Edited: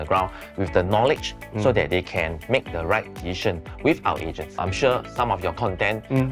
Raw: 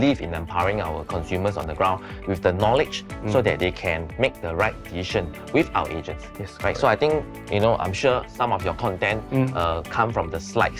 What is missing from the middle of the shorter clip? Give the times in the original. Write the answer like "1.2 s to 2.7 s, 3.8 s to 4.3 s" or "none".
6.4 s to 7.9 s

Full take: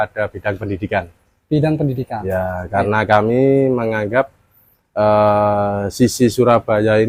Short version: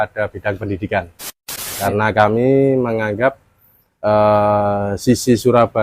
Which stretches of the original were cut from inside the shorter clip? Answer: 1.5 s to 2.4 s

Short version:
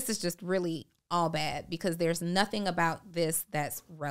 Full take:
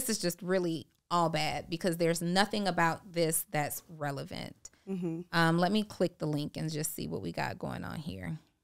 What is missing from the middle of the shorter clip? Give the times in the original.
none

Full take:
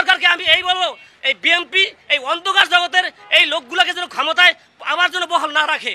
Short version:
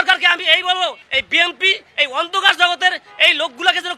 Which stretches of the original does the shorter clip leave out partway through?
1.0 s to 1.1 s

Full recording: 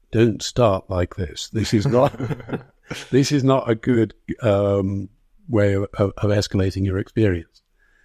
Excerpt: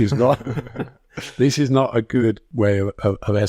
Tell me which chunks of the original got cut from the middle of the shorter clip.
4.2 s to 5.4 s

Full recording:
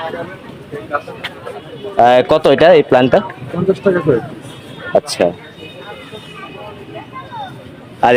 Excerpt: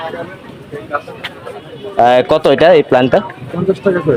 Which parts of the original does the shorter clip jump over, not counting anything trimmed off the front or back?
none

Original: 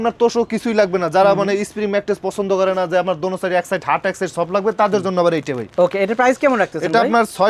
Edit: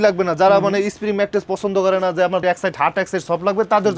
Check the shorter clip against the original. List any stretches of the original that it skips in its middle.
3.2 s to 3.5 s

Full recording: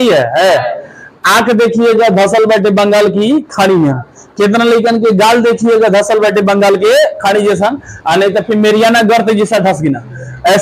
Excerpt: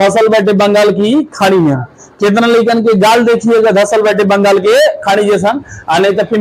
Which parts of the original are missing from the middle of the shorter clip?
none

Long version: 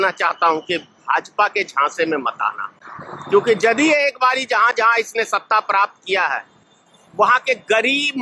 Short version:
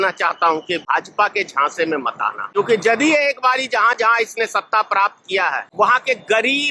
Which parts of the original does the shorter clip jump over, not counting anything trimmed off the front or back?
0.8 s to 1.0 s, 2.8 s to 3.4 s, 6.4 s to 7.0 s

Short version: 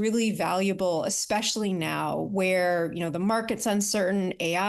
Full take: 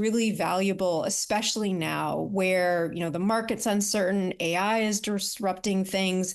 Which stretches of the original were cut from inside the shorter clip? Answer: none

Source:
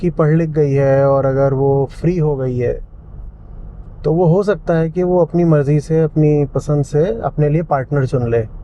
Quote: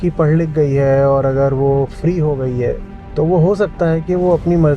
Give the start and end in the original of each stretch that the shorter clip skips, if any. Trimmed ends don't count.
2.9 s to 3.8 s

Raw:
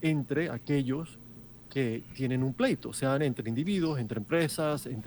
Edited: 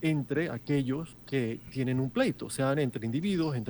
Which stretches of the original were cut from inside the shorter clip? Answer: 1.1 s to 1.6 s

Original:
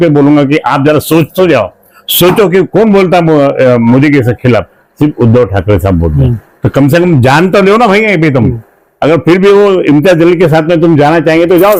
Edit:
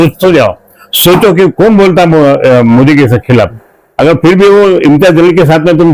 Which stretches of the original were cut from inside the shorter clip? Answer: 4.8 s to 8.7 s

